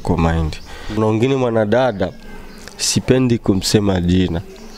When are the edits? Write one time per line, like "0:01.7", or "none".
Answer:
0:01.0